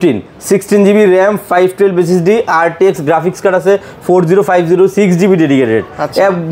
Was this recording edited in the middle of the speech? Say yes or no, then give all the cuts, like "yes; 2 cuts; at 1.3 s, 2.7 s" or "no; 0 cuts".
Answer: no; 0 cuts